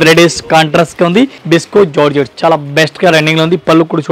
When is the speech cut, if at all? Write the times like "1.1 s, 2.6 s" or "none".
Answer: 1.4 s